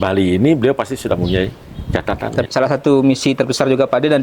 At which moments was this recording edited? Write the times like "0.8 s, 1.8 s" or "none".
2.4 s